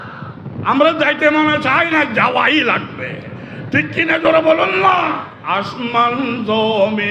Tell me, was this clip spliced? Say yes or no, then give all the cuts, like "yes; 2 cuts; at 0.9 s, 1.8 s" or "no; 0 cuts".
yes; 1 cut; at 5.3 s